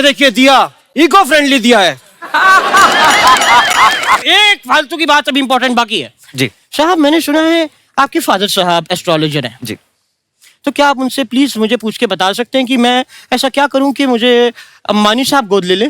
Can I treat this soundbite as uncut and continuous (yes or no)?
no